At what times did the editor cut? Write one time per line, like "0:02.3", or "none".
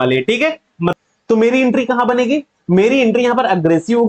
0:01.0